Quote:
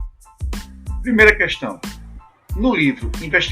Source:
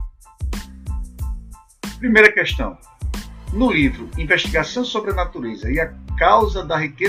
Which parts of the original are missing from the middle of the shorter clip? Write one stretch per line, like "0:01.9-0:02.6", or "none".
0:01.0-0:02.0